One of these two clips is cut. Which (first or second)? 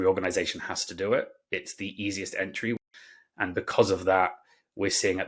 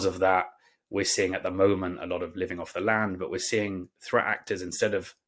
first